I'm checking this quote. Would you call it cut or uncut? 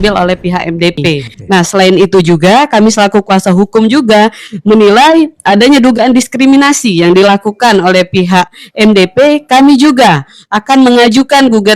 cut